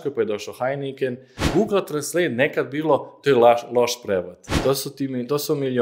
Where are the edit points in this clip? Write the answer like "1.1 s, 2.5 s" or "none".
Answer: 1.4 s, 4.4 s